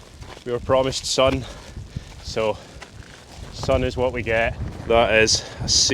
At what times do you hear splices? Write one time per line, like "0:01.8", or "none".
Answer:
0:04.7